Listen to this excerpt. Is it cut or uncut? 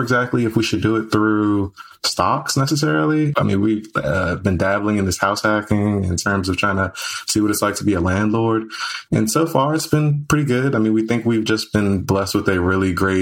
cut